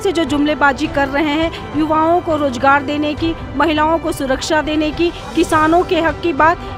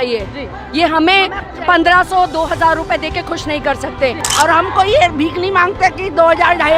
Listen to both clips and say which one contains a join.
second; 1 cut; at 4.2 s

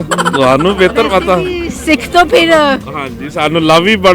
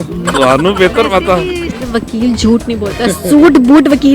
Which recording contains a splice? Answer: second; 1 cut; at 1.7 s

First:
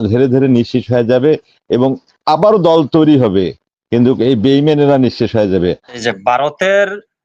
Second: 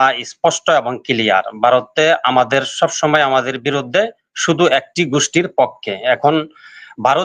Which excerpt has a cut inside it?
first; 1 cut; at 5.9 s

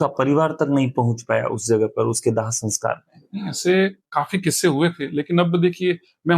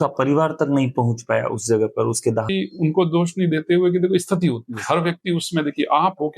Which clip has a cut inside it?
second; 1 cut; at 2.5 s

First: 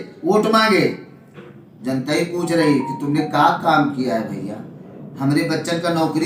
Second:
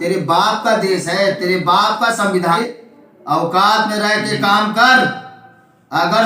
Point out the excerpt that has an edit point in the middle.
second; 1 cut; at 2.6 s

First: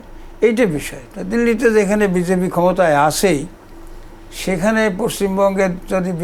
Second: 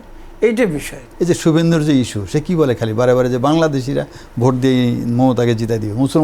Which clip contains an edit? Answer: second; 1 cut; at 1.0 s

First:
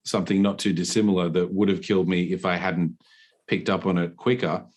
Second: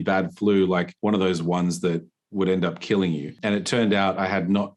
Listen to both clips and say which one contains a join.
second; 2 cuts; at 0.9 s, 3.3 s

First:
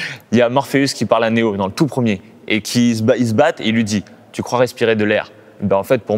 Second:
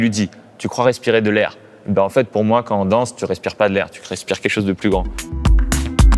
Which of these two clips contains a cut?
second; 1 cut; at 5.2 s

